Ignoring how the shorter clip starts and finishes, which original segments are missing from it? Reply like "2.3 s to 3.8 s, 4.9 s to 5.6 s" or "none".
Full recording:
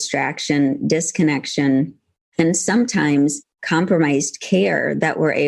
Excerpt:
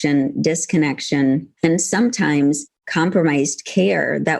1.9 s to 2.2 s